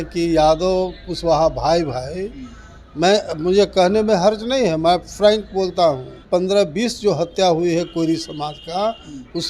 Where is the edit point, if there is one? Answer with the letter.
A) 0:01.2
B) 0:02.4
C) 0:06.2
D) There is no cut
C